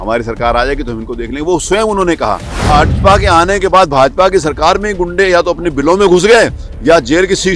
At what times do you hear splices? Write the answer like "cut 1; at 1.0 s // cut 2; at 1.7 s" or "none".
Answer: cut 1; at 2.6 s

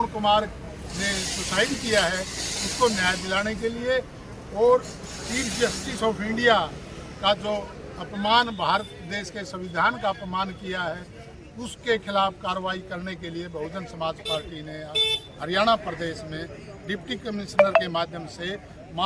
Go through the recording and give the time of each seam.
none

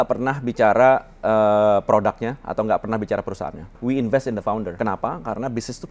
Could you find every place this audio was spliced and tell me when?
cut 1; at 3.7 s // cut 2; at 4.7 s

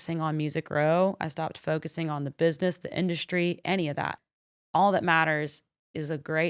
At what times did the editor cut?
cut 1; at 4.2 s

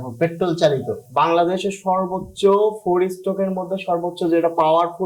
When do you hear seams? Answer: cut 1; at 1.0 s

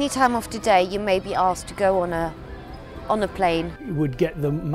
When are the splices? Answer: cut 1; at 3.8 s

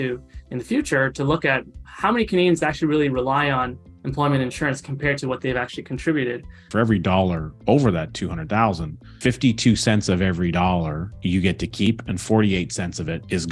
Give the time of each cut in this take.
cut 1; at 6.6 s

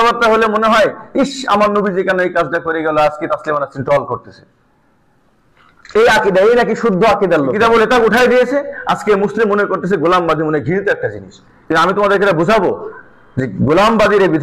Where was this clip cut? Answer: cut 1; at 7.5 s

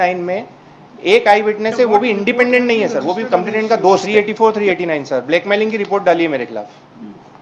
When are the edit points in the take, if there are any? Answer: cut 1; at 4.1 s

